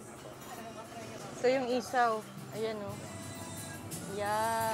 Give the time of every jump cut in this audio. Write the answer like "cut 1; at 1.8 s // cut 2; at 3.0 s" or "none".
none